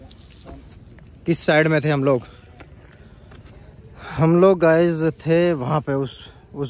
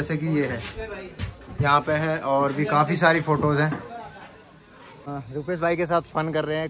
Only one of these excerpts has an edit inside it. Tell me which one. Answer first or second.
second